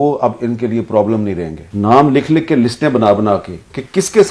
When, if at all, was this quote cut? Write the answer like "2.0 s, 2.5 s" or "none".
1.6 s